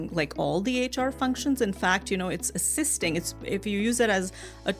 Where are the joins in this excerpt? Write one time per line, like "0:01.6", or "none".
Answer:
none